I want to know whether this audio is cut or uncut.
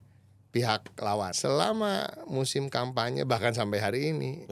cut